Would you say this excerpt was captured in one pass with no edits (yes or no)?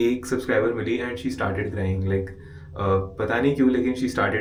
yes